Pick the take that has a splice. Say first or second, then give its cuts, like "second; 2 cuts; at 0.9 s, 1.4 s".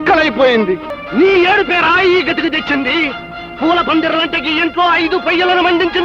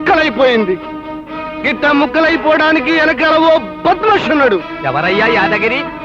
first; 1 cut; at 0.9 s